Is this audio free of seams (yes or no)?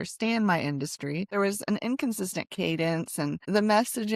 no